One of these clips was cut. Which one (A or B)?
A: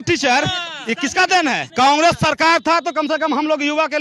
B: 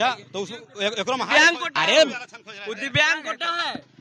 A